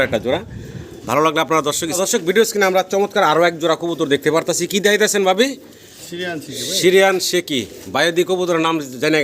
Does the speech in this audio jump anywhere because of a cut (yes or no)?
yes